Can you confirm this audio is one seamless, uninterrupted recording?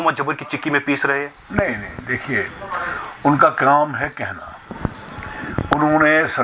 yes; 0 cuts

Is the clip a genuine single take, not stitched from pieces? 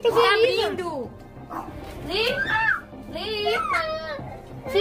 no; 1 cut; at 1.7 s

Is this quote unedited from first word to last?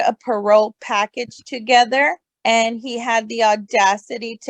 no; 1 cut; at 2.3 s

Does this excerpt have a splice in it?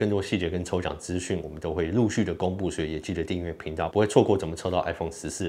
no; 0 cuts

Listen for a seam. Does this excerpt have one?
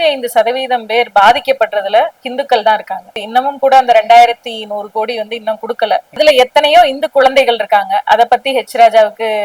yes; 1 cut; at 3.1 s

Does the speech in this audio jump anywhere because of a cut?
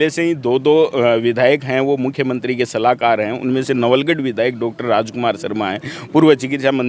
no; 0 cuts

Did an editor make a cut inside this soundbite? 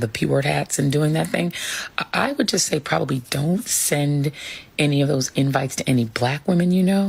no; 0 cuts

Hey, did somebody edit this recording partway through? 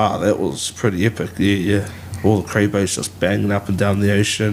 yes; 1 cut; at 2.0 s

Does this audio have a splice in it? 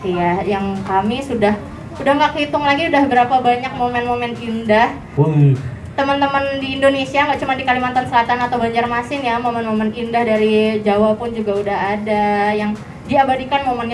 no; 0 cuts

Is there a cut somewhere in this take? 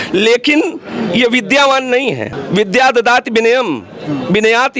yes; 1 cut; at 2.4 s

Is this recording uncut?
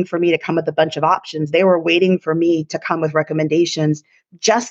yes; 0 cuts

